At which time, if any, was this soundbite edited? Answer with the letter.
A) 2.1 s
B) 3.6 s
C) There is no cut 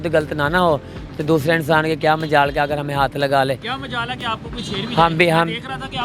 C